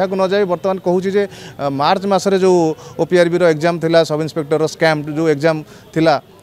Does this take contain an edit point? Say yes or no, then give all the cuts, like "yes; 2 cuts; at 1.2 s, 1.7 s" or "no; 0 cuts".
no; 0 cuts